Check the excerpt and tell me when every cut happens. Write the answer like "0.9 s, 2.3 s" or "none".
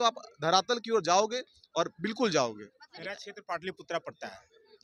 3.1 s